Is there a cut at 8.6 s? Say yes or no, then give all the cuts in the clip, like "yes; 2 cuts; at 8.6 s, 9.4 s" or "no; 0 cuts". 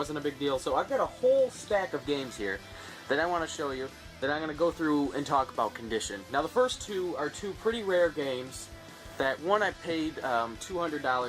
yes; 1 cut; at 8.6 s